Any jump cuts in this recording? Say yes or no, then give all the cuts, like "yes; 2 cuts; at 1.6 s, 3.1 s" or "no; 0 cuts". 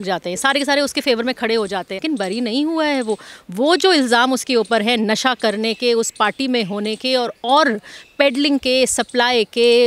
yes; 1 cut; at 2.0 s